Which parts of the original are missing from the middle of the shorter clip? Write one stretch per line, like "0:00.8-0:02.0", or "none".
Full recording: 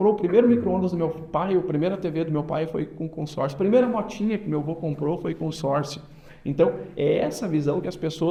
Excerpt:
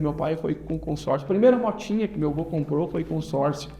none